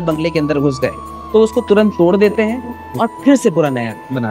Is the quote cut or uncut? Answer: uncut